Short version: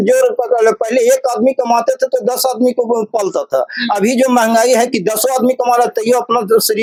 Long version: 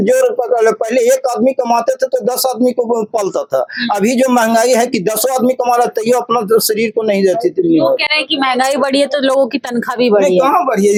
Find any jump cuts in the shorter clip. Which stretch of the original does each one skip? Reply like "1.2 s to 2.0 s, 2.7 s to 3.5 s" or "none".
none